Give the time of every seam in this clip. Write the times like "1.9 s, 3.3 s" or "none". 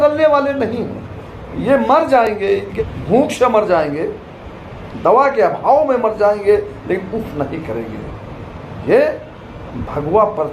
2.7 s